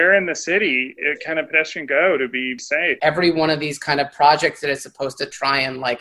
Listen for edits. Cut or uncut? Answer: cut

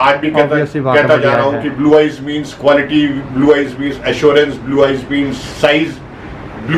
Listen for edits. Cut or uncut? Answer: uncut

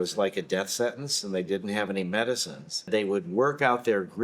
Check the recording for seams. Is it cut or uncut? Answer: cut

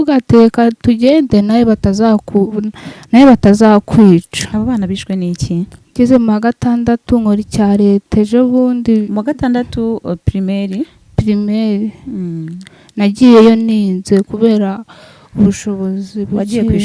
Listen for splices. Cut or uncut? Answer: cut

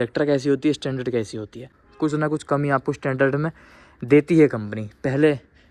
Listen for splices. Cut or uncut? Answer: cut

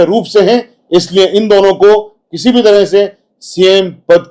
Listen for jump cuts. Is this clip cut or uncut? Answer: uncut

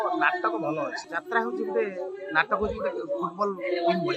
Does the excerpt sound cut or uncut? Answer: cut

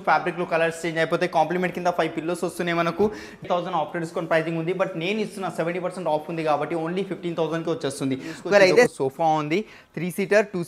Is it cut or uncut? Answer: cut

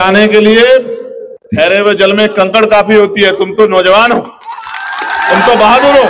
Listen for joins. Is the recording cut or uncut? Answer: uncut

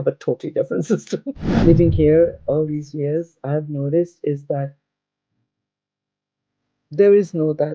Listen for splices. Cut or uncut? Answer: cut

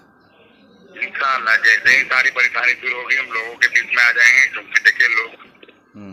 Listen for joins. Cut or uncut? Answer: uncut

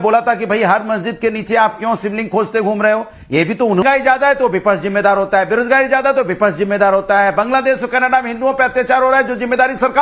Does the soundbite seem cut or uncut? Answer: cut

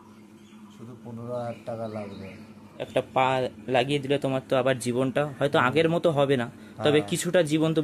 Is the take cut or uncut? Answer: cut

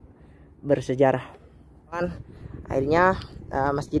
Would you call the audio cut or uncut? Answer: cut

